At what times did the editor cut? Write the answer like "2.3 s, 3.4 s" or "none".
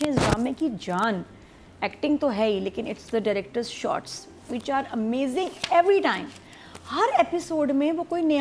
none